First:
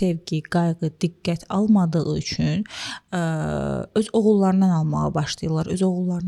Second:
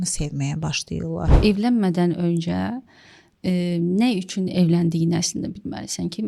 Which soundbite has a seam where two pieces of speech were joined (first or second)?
second